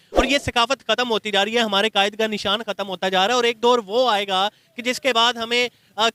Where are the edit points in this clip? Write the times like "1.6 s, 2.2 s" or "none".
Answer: none